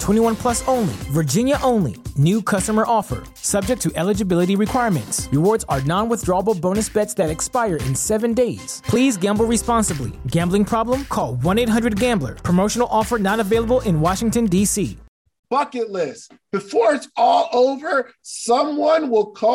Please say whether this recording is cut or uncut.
cut